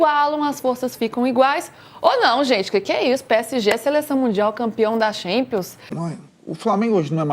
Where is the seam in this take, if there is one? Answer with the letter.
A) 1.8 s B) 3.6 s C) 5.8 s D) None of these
C